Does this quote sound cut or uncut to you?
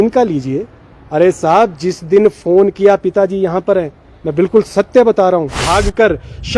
cut